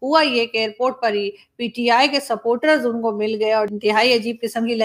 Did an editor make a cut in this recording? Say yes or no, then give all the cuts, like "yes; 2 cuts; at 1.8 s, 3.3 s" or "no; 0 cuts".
yes; 1 cut; at 3.7 s